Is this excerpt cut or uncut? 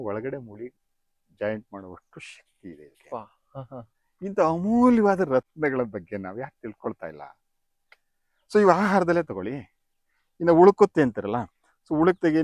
uncut